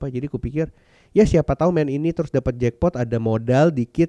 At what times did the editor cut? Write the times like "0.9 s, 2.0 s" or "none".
none